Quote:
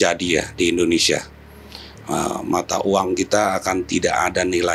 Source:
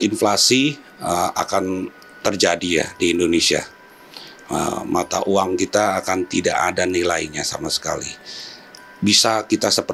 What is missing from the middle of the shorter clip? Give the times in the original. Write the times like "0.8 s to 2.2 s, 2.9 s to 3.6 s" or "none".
none